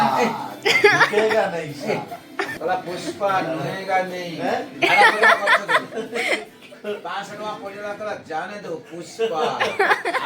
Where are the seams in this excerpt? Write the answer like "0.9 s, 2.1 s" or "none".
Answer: 2.4 s